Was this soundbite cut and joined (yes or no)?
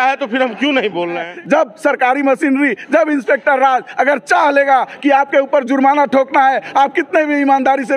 yes